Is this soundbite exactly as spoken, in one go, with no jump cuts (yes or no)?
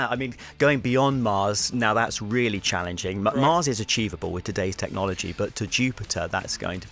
yes